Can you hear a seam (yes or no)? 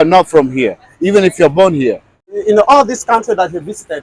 yes